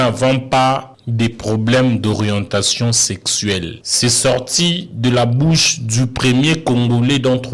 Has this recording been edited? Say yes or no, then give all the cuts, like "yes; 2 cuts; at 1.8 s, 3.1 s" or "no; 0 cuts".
yes; 2 cuts; at 1.0 s, 3.8 s